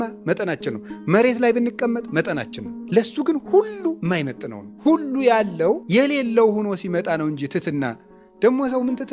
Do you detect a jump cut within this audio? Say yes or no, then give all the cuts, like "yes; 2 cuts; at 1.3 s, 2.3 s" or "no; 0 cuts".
no; 0 cuts